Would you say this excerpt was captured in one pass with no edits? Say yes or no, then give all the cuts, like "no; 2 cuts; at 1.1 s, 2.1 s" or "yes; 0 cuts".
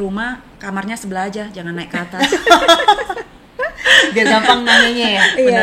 yes; 0 cuts